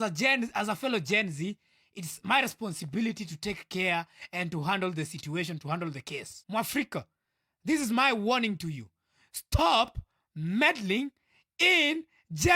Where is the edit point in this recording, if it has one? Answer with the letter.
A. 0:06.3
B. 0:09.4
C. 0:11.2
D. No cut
A